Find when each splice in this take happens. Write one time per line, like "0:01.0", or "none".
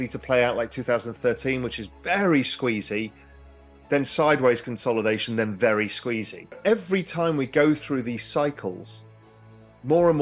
0:06.6